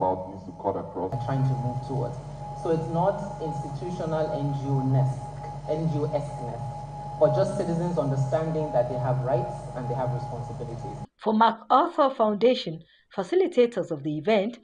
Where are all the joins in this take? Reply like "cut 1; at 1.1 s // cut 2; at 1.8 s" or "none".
cut 1; at 1.2 s